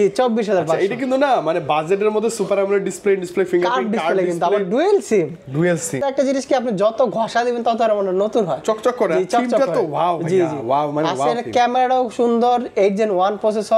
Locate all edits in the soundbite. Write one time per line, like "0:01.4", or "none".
0:06.0